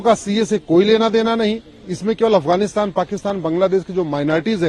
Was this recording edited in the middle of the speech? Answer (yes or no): no